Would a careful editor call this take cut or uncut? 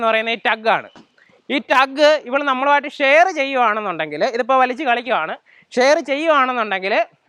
uncut